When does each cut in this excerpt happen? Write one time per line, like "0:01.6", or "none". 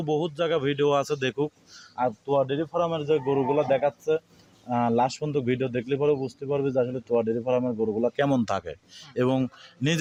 none